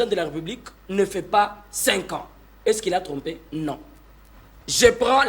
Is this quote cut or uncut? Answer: uncut